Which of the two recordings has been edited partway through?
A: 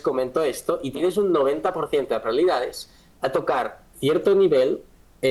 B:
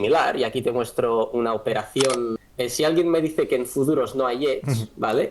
B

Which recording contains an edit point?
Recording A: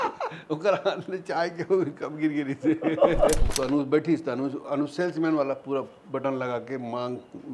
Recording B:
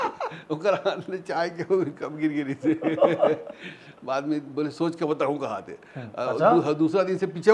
A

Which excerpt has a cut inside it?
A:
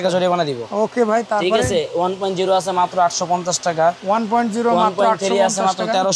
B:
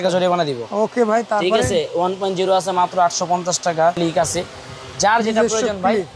B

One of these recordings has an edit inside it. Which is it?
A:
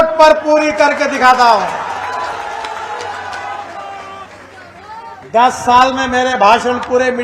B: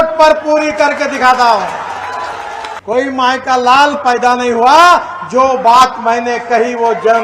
B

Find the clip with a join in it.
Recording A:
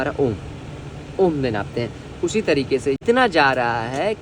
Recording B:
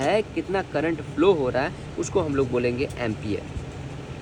A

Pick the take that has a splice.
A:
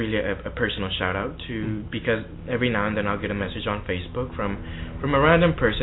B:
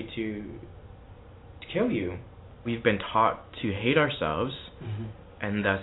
B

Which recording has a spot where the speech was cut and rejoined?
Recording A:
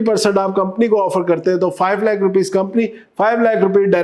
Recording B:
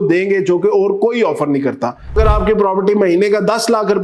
B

